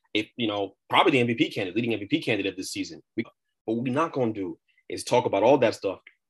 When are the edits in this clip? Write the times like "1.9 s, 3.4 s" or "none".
3.3 s